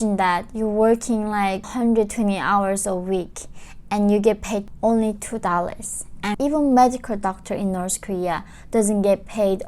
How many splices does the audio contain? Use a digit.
3